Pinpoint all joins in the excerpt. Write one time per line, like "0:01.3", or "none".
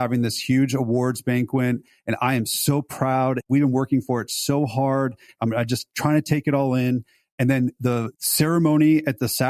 0:03.4
0:05.4
0:07.8

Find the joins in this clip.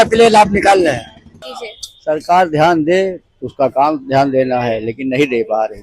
0:01.5

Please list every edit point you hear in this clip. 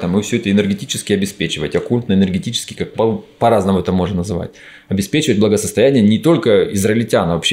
none

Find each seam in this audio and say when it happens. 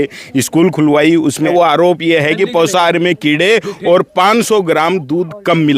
0:01.5

